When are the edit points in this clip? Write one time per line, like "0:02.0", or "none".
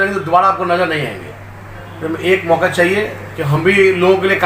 none